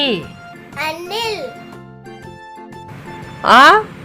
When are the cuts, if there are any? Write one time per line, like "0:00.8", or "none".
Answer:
0:01.5
0:02.9